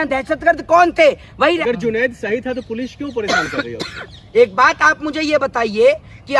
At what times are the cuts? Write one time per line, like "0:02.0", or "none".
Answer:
0:01.6